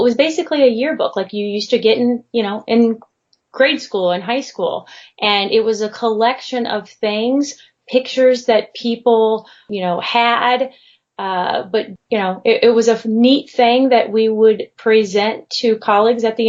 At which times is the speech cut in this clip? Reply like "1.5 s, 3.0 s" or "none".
9.6 s, 11.9 s